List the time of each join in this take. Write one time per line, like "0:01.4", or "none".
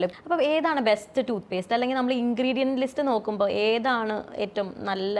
none